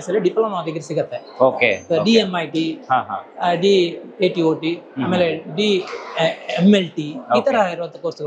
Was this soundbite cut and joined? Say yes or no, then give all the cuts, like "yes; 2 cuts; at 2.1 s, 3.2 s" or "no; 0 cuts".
no; 0 cuts